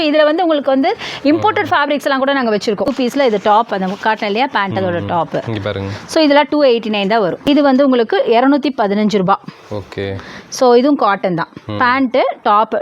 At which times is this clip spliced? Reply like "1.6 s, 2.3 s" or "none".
2.9 s, 7.4 s